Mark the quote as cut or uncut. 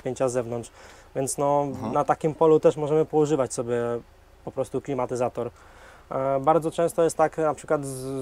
uncut